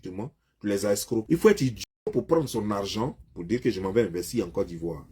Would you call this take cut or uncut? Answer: cut